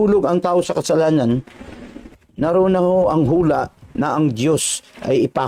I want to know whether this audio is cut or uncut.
uncut